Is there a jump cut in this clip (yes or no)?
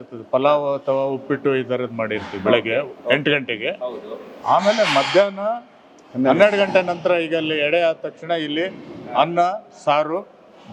no